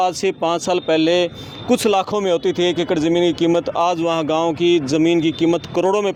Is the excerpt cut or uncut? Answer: uncut